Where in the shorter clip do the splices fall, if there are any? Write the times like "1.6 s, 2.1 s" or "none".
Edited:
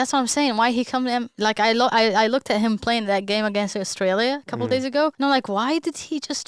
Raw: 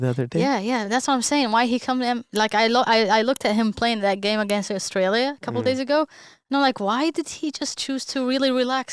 5.1 s